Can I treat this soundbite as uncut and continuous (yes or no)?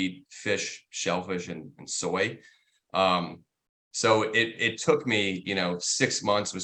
yes